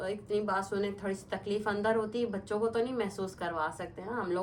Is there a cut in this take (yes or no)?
no